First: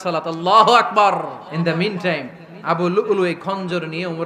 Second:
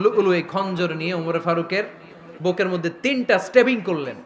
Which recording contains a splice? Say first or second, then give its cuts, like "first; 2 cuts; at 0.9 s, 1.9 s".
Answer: first; 1 cut; at 1.4 s